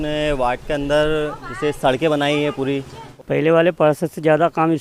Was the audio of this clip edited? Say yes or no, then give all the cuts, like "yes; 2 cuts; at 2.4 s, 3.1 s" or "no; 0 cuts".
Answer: yes; 1 cut; at 3.0 s